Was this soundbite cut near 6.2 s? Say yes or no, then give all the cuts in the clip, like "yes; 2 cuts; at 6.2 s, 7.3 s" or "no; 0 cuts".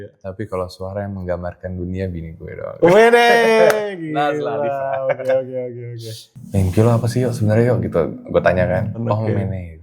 yes; 2 cuts; at 6.2 s, 9.0 s